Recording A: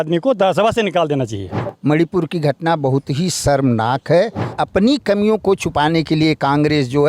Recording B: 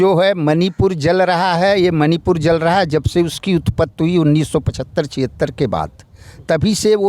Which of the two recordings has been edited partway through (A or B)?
A